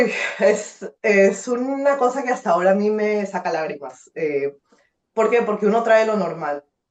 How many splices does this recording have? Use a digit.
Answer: 0